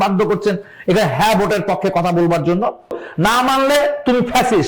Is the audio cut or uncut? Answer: cut